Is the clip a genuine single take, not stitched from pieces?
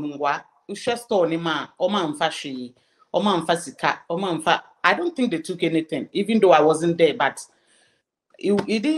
yes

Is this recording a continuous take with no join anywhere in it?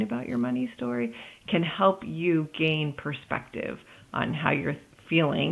yes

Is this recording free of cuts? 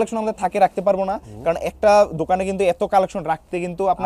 yes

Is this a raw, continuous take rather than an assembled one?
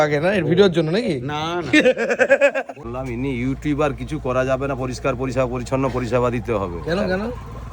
no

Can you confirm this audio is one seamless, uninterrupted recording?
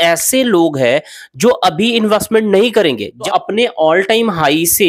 no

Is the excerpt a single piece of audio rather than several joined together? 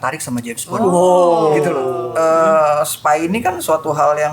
no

